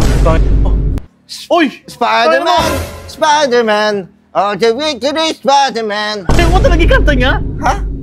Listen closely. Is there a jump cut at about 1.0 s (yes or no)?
yes